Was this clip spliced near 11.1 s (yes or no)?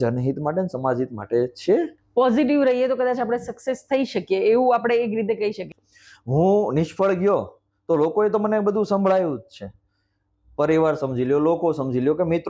no